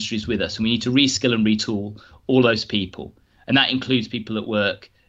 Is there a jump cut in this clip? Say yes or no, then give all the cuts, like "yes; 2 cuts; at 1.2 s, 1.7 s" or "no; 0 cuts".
no; 0 cuts